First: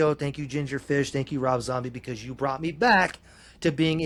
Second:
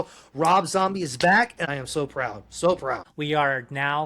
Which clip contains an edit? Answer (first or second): second